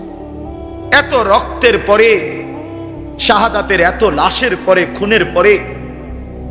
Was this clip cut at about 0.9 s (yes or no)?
yes